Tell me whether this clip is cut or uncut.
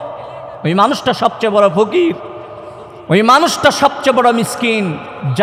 uncut